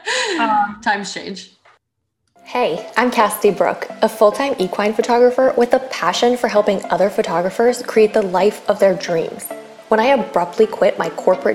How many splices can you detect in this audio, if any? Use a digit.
1